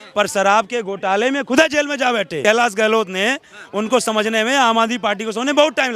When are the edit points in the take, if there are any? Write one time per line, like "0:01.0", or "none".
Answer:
0:02.4